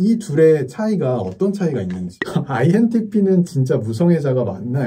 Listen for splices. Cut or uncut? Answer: cut